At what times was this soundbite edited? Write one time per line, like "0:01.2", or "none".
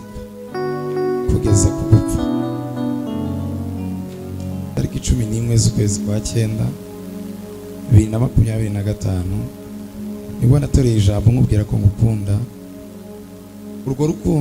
0:04.8

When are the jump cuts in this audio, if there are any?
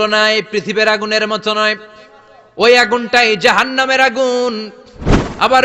none

